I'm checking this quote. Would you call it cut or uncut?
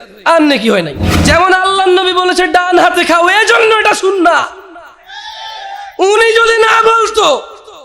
cut